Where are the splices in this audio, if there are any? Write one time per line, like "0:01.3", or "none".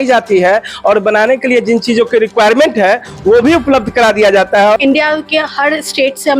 0:04.8